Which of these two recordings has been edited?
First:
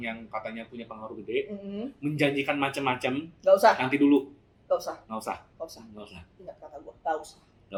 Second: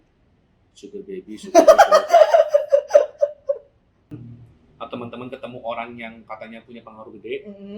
second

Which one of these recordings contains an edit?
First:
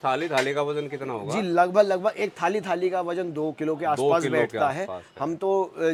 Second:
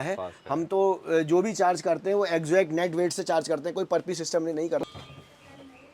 second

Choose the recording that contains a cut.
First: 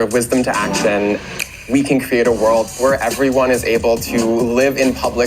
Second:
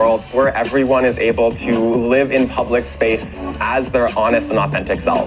first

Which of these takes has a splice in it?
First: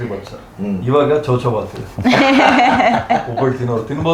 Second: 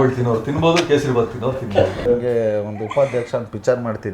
second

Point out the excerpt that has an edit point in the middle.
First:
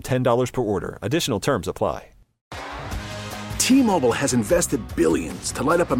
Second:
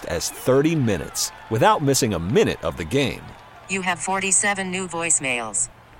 first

